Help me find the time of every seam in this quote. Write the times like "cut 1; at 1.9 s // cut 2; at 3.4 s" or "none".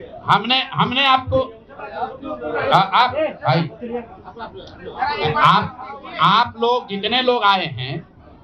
none